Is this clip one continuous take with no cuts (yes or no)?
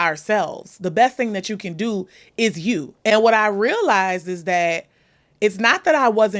no